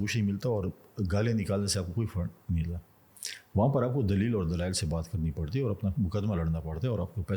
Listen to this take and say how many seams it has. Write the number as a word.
zero